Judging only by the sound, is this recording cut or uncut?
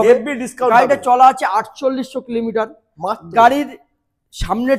uncut